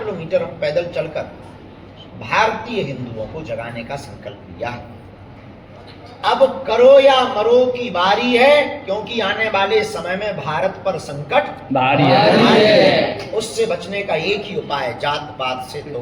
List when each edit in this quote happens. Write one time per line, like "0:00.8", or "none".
0:05.4